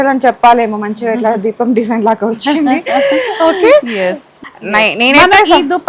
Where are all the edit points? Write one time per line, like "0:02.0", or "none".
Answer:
0:04.3